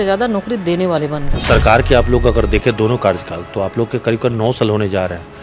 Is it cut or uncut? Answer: cut